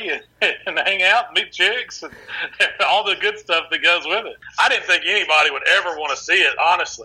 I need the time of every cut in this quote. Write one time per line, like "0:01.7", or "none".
0:04.4

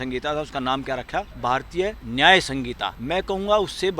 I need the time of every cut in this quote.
0:01.7
0:02.9

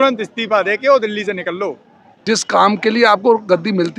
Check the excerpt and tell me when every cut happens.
0:02.1

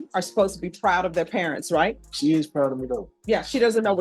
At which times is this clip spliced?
0:02.1
0:03.1

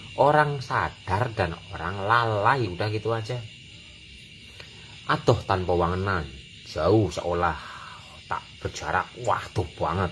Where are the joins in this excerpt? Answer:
none

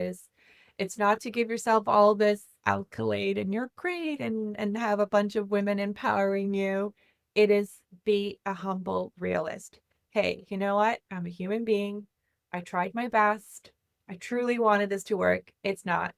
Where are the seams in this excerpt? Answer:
none

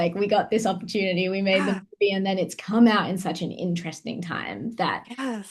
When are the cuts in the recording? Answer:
none

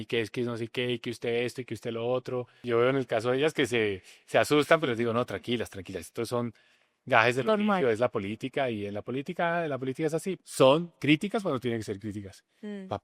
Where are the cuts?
0:02.6
0:10.4

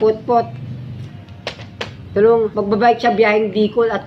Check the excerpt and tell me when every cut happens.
0:02.5

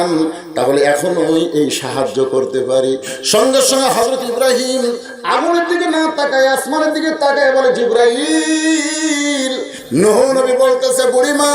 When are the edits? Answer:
0:09.7

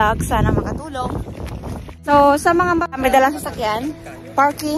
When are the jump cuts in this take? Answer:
0:01.9
0:03.0

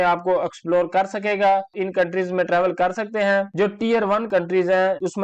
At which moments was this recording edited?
0:01.7
0:03.5

